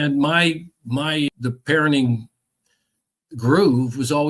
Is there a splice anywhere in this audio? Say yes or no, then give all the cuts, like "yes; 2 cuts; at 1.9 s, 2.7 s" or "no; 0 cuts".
yes; 1 cut; at 1.3 s